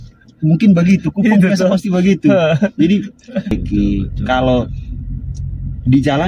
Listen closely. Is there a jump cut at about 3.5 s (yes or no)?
yes